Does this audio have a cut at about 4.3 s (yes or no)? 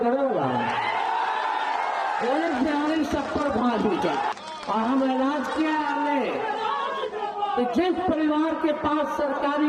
yes